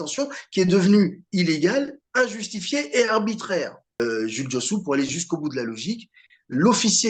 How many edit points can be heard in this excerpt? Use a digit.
1